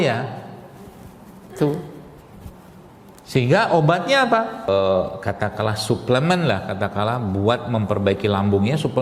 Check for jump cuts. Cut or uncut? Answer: cut